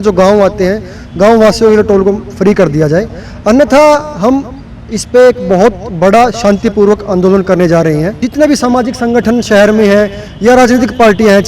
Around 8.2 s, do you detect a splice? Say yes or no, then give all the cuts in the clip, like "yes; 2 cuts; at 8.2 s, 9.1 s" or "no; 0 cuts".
yes; 1 cut; at 8.2 s